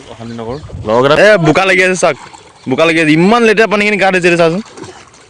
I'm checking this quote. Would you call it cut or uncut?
cut